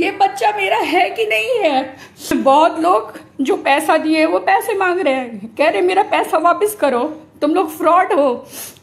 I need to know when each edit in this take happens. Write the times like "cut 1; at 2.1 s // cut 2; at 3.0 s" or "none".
cut 1; at 2.3 s